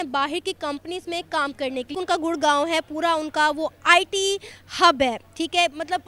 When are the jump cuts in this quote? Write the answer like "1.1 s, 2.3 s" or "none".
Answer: 1.9 s